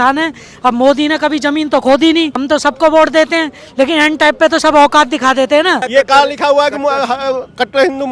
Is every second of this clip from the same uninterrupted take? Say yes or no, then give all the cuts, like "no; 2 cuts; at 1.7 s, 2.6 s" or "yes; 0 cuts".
no; 2 cuts; at 2.4 s, 5.8 s